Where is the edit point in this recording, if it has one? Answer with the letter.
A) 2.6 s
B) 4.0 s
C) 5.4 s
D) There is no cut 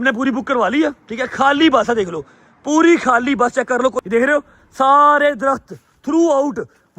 B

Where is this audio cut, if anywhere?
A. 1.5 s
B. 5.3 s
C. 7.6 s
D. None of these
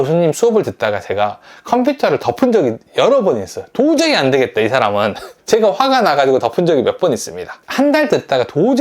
C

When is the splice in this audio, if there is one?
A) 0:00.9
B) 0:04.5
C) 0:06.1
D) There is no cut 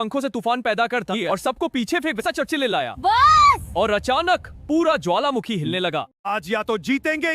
C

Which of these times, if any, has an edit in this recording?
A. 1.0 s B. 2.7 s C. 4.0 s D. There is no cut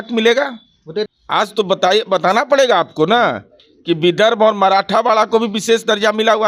A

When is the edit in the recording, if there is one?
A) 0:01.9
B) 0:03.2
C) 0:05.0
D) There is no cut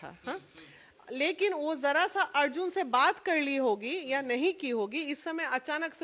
D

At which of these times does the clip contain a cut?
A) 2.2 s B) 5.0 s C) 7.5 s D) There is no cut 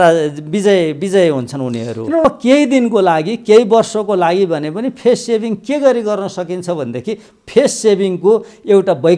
A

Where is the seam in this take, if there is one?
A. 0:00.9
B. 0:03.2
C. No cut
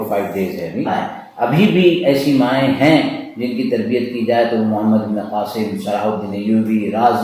A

